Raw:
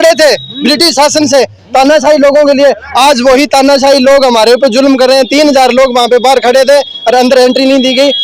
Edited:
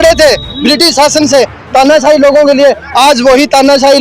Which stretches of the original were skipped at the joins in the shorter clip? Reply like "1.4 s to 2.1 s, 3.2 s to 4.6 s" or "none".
none